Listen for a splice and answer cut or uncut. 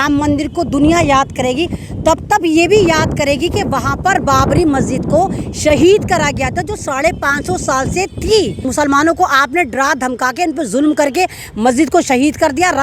cut